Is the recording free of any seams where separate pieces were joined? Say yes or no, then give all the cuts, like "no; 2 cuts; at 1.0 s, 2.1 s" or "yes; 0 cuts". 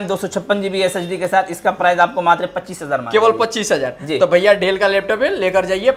yes; 0 cuts